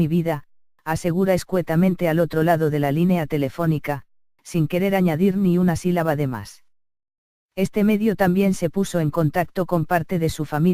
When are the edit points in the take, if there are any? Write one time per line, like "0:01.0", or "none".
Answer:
0:01.7